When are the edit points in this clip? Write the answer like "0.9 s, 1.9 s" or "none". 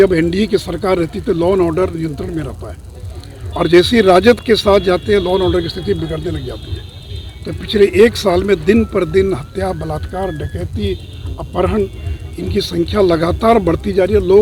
none